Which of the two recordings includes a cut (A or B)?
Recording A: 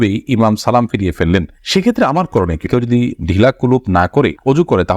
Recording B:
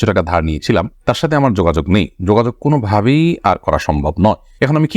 A